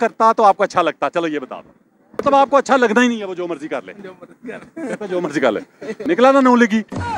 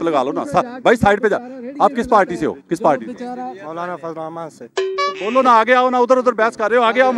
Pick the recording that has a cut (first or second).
first